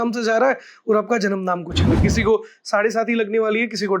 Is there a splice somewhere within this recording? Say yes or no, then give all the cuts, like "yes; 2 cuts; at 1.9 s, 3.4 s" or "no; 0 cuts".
yes; 1 cut; at 2.0 s